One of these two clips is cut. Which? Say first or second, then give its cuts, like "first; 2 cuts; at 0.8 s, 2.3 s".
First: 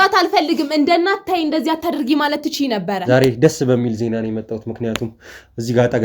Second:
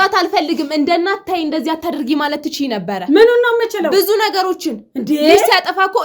first; 1 cut; at 3.0 s